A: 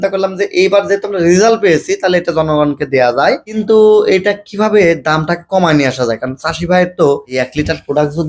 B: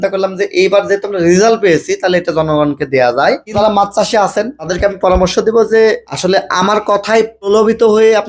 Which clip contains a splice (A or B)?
B